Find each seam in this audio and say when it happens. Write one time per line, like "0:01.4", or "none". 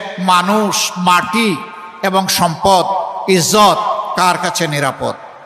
none